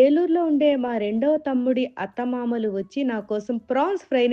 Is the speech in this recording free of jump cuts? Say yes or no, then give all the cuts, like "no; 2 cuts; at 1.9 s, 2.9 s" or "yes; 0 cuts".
yes; 0 cuts